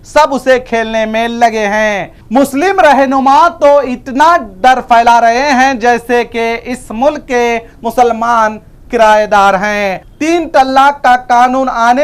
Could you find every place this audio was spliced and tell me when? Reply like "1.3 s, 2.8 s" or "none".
10.0 s